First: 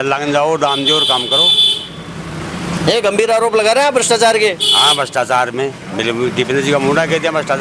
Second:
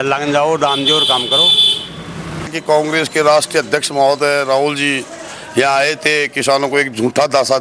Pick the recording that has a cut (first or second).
second